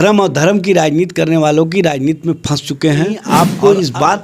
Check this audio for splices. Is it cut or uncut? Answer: cut